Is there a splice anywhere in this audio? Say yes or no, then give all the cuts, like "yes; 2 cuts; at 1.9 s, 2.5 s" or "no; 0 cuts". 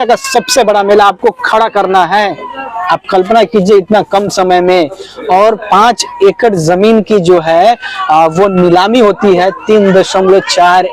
no; 0 cuts